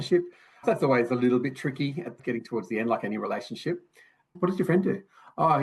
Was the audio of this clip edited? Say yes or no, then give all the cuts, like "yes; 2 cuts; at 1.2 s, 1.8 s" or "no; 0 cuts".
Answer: yes; 1 cut; at 4.3 s